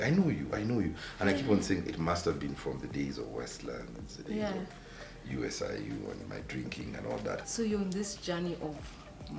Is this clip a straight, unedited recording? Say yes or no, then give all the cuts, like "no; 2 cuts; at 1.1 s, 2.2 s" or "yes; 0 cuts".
no; 1 cut; at 7.4 s